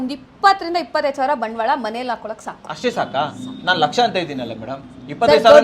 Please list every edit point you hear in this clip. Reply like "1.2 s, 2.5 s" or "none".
none